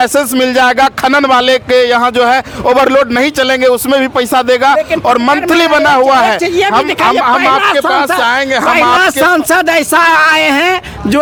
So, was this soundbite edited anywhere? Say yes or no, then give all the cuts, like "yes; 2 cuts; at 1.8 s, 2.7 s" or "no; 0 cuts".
no; 0 cuts